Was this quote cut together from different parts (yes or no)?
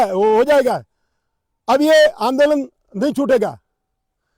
no